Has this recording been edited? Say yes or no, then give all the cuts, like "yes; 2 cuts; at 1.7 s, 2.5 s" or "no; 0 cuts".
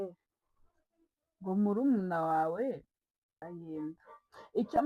yes; 1 cut; at 3.4 s